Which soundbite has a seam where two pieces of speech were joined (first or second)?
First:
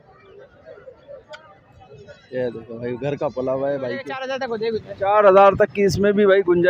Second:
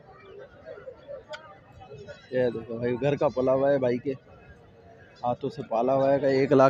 first